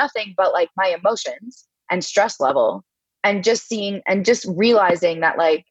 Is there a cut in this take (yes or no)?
no